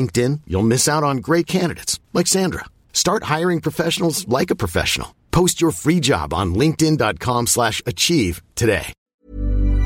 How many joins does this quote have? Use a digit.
1